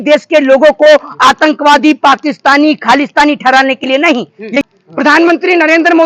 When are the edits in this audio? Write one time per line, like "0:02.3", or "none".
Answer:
0:04.6